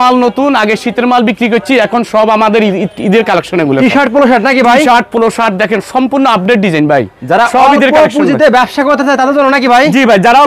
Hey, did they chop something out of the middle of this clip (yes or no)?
no